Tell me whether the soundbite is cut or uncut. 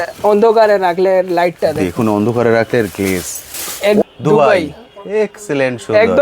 cut